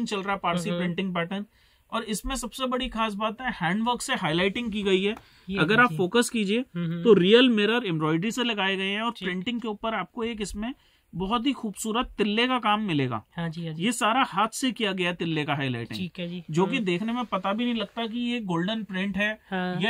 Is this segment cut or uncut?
uncut